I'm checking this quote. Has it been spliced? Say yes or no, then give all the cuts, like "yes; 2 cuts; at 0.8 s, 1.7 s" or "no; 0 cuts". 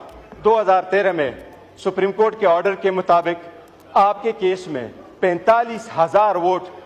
no; 0 cuts